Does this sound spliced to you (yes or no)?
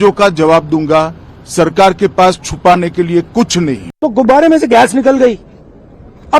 yes